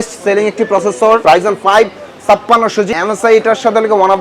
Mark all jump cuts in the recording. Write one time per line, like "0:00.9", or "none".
0:01.2
0:02.9

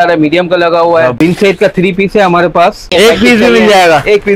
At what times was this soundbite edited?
0:01.2
0:02.9

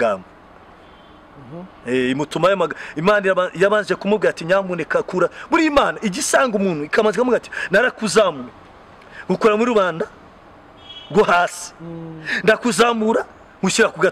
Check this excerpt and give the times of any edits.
none

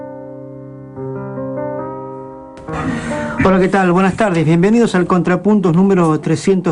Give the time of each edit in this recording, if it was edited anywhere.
none

